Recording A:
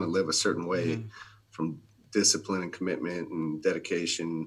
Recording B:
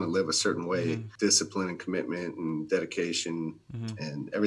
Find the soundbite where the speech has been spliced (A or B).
B